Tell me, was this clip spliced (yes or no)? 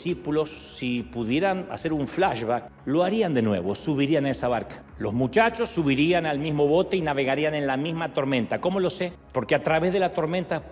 yes